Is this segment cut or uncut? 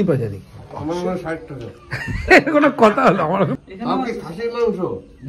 cut